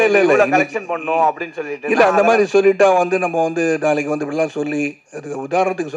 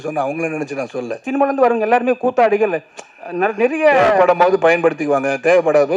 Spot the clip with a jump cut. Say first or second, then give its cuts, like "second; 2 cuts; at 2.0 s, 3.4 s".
second; 1 cut; at 1.2 s